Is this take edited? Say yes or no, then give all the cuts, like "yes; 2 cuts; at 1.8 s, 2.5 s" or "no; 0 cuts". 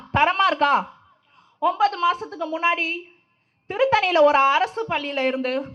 no; 0 cuts